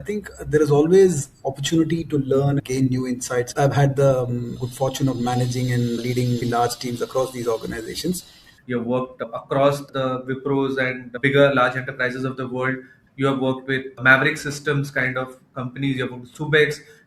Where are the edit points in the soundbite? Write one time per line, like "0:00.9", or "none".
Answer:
0:02.6
0:03.5
0:08.6
0:12.9